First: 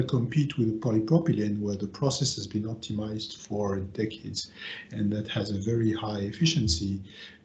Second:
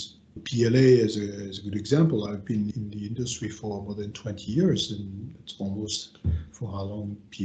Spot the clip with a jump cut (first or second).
second